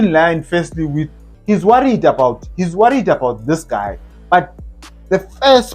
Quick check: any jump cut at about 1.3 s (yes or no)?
yes